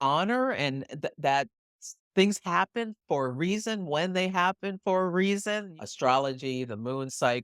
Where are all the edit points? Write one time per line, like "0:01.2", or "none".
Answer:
0:05.8